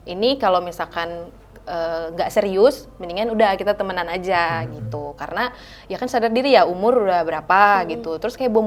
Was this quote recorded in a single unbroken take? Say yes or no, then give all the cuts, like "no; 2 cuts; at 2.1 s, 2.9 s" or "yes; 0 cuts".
yes; 0 cuts